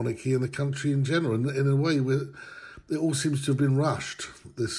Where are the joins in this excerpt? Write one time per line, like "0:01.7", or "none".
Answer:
none